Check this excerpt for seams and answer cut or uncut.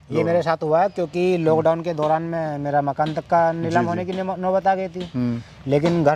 uncut